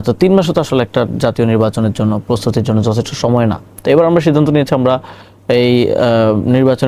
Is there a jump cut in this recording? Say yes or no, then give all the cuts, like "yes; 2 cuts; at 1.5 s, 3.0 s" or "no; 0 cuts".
no; 0 cuts